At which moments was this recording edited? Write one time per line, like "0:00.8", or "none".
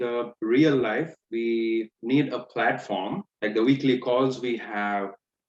0:03.2